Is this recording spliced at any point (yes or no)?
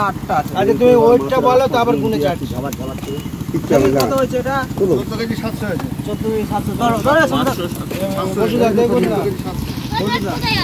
no